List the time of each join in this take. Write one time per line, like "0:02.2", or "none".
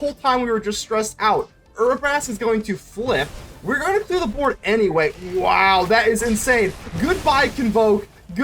none